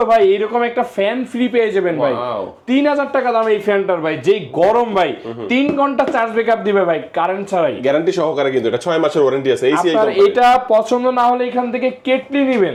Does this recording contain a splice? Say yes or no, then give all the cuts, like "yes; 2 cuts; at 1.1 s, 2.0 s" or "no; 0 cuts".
no; 0 cuts